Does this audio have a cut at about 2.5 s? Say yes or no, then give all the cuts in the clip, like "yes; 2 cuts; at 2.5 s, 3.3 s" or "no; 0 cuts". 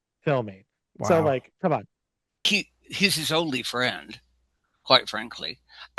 yes; 1 cut; at 2.5 s